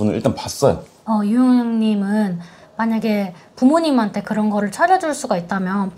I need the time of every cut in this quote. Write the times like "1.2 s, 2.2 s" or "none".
0.9 s